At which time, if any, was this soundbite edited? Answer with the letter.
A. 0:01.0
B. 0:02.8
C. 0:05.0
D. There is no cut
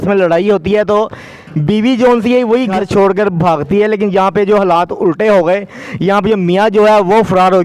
B